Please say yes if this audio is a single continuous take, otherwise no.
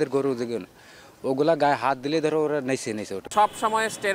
no